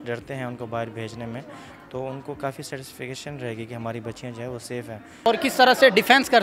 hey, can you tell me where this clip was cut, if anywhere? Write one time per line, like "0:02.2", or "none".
0:05.3